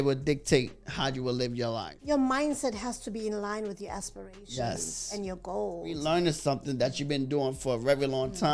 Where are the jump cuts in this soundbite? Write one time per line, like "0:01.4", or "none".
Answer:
0:01.8
0:06.0